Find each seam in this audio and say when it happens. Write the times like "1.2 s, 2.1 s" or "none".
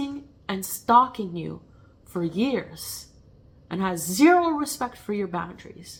none